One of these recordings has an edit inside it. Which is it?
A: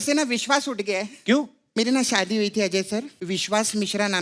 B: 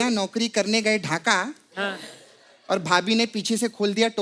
A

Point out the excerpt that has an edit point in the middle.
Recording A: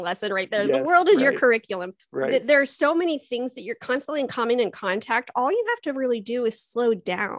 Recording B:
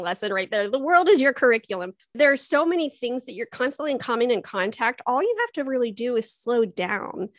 B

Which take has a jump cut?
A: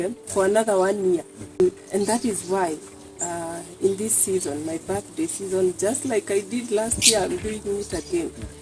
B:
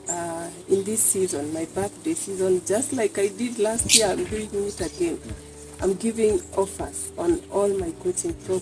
A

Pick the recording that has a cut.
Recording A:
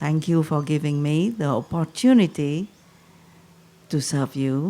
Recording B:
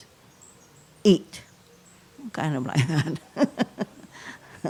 A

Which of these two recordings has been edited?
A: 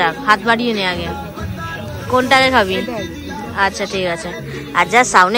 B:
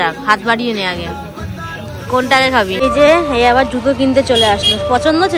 B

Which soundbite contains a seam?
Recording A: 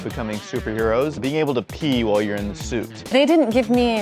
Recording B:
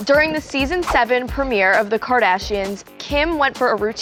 A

